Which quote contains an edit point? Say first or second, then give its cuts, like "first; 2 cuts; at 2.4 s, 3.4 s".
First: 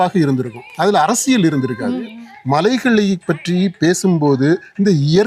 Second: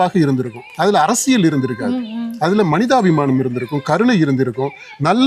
first; 1 cut; at 2.2 s